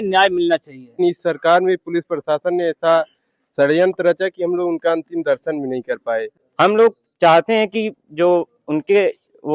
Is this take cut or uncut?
cut